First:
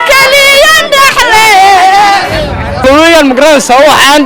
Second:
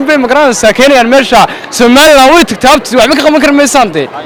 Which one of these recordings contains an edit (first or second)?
first